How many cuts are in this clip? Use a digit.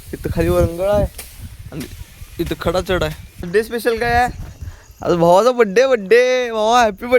1